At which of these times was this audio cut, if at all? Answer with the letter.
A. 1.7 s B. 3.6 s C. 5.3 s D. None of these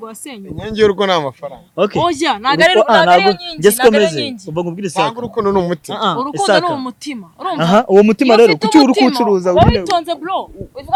D